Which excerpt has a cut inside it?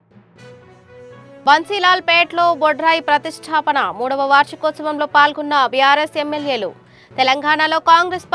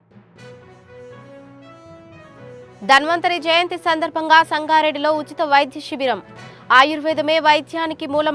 first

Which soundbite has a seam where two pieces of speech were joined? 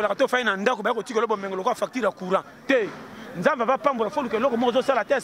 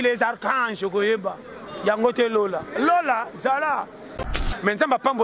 second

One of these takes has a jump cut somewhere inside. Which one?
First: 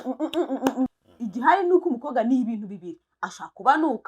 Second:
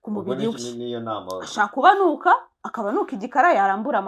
first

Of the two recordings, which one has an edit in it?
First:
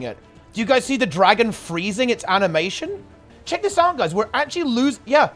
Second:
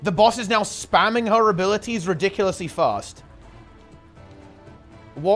first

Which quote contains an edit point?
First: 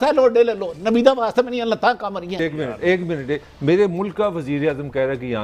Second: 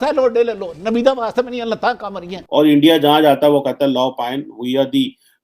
second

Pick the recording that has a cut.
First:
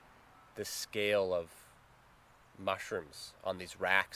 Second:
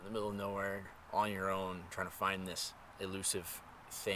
second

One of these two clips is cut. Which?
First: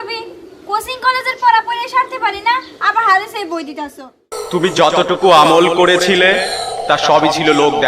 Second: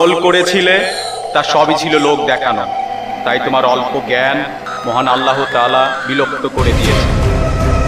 first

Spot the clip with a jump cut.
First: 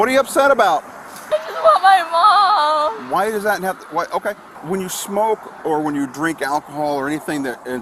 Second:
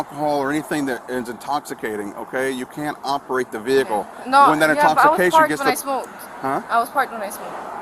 first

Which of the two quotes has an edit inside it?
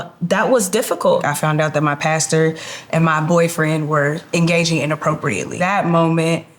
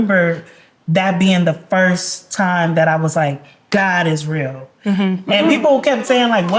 first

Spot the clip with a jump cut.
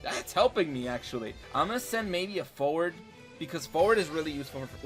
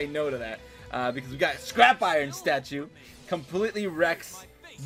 first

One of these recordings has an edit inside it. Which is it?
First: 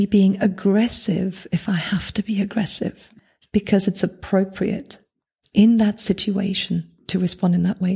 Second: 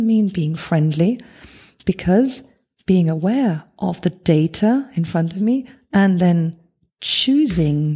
first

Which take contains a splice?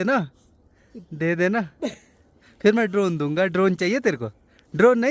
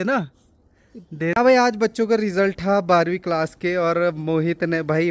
second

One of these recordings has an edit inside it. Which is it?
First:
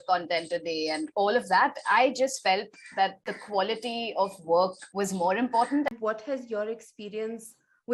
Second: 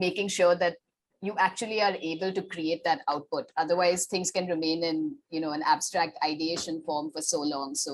first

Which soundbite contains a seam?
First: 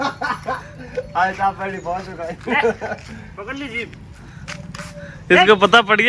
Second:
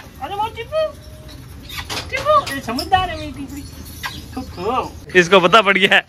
second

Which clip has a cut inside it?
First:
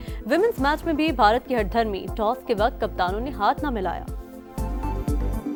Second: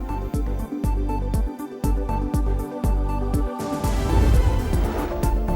second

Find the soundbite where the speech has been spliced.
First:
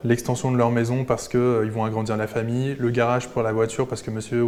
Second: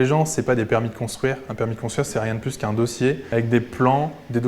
second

